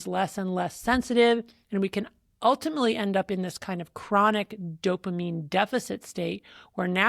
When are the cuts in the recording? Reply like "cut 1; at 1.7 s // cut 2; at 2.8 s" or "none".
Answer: none